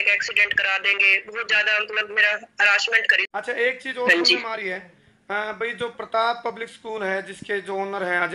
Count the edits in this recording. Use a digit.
1